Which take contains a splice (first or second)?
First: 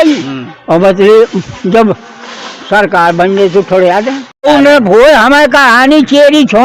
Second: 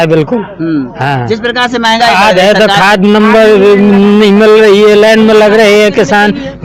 first